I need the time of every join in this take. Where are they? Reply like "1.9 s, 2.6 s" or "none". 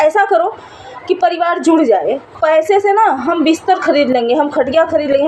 2.4 s